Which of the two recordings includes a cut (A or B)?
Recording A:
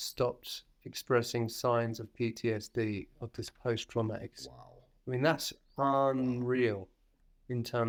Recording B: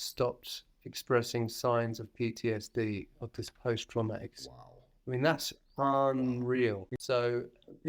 B